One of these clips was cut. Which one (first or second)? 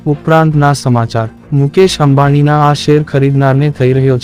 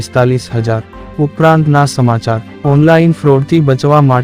second